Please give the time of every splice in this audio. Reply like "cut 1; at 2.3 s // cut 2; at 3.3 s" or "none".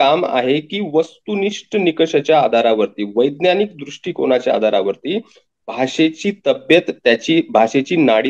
none

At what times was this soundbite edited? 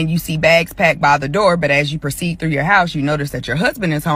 none

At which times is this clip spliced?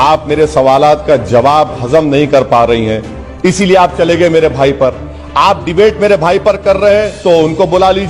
none

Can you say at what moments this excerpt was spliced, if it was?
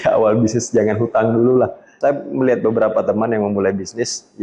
cut 1; at 1.9 s

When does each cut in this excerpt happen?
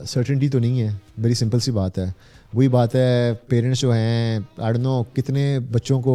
none

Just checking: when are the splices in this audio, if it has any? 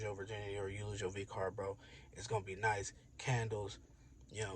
none

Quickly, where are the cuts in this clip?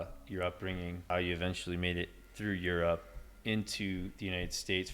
cut 1; at 1.1 s

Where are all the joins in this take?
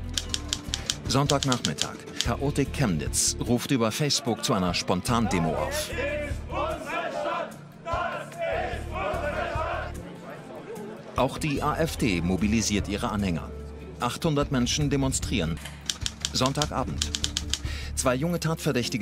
none

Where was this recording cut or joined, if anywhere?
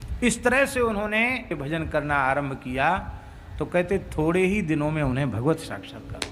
cut 1; at 1.5 s

